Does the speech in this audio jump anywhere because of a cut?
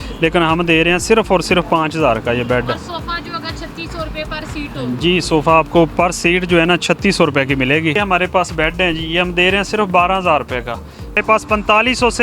yes; 2 cuts; at 7.9 s, 11.2 s

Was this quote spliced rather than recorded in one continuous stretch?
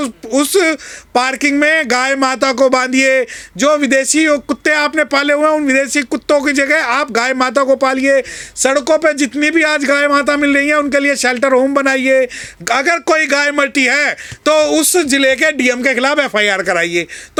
no; 0 cuts

